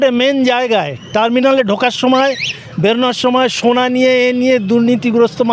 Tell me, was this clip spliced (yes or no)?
no